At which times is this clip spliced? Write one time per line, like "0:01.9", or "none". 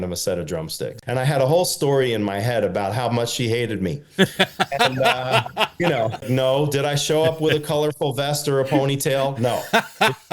0:00.9
0:06.3